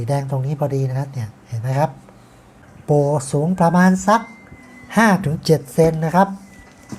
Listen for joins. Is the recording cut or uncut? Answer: cut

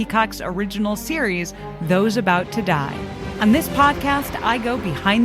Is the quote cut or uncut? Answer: cut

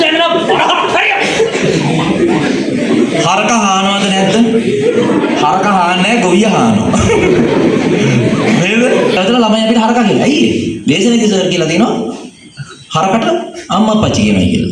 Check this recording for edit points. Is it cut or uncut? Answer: cut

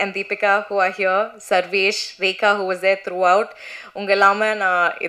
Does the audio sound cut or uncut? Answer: uncut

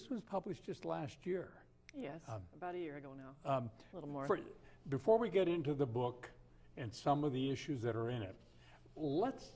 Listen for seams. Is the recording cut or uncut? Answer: cut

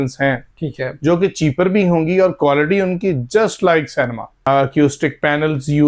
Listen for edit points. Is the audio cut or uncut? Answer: cut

